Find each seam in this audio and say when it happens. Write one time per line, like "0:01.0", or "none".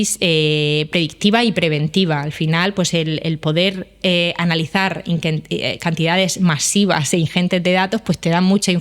none